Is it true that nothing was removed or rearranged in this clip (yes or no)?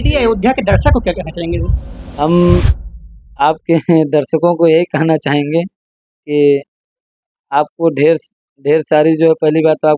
yes